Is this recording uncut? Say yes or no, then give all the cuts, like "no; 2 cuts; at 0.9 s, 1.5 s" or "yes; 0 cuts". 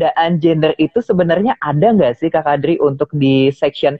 yes; 0 cuts